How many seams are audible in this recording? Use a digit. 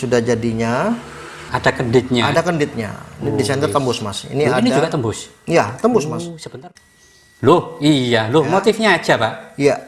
2